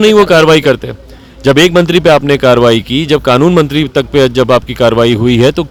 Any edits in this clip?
no; 0 cuts

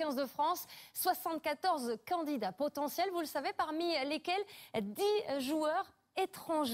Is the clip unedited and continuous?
yes; 0 cuts

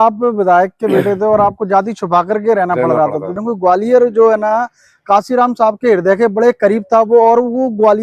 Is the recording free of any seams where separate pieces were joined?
no; 1 cut; at 3.4 s

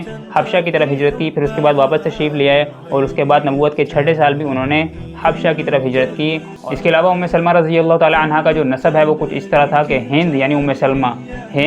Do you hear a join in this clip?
yes; 1 cut; at 6.5 s

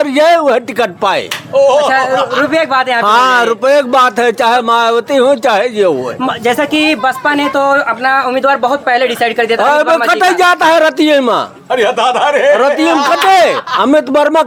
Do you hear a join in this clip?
no; 0 cuts

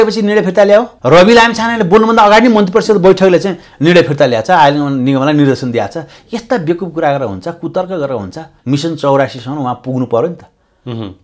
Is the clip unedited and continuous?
no; 2 cuts; at 0.9 s, 8.5 s

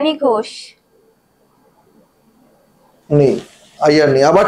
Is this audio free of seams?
yes; 0 cuts

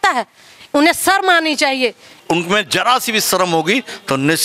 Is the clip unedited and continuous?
no; 1 cut; at 2.1 s

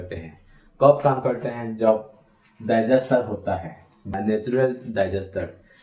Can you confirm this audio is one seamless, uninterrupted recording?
no; 1 cut; at 4.1 s

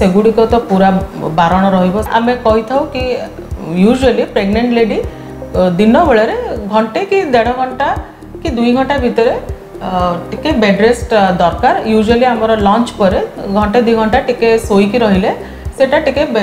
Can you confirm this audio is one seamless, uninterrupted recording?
no; 1 cut; at 2.1 s

